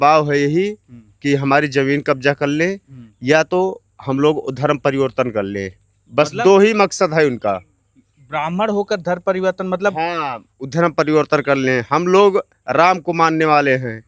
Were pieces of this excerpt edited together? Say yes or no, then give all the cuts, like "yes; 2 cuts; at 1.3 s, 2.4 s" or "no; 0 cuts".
no; 0 cuts